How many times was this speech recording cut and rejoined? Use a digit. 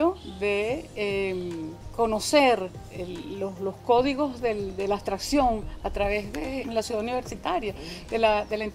2